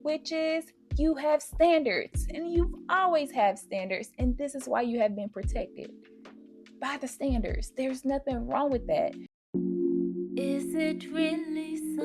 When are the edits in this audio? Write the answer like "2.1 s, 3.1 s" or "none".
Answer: 9.3 s